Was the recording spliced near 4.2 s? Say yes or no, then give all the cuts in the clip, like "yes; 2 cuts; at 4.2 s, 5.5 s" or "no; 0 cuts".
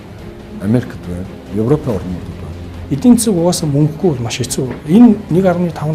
no; 1 cut; at 2.8 s